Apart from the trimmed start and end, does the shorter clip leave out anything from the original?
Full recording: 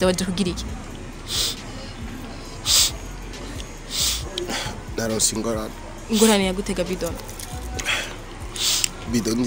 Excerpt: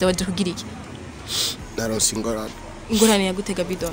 yes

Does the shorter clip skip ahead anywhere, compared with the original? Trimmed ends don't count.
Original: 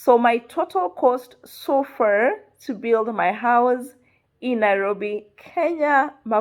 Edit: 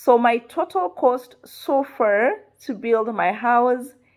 no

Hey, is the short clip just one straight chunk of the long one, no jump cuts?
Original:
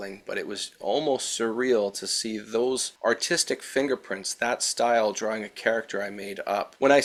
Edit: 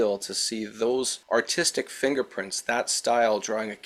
yes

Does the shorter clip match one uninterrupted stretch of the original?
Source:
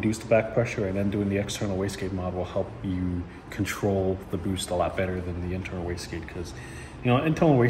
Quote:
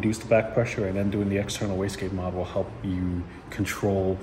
yes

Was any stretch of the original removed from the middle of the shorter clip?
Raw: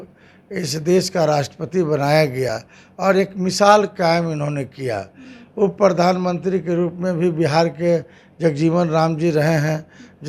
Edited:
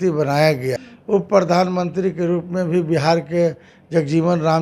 yes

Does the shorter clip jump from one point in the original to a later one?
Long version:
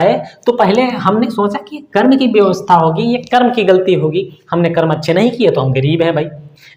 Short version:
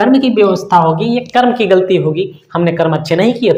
no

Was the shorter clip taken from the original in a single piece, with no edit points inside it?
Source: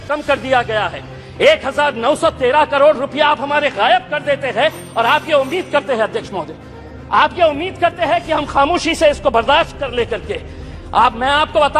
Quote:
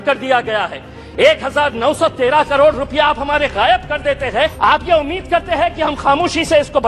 no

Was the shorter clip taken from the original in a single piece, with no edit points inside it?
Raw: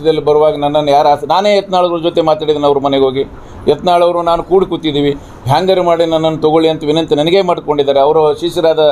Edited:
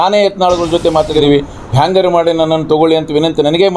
no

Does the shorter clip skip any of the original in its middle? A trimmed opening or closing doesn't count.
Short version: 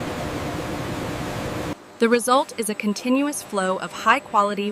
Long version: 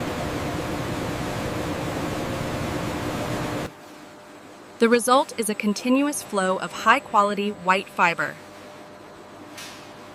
yes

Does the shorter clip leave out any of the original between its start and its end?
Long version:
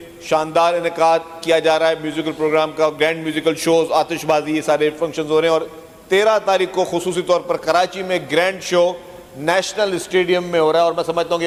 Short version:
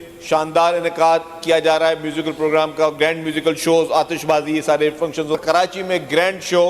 yes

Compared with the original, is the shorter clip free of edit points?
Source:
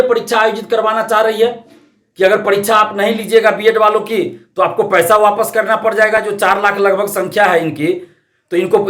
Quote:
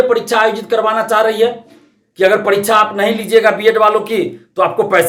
yes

